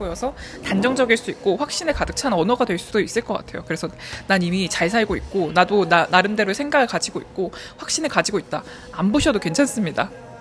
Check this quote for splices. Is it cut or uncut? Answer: uncut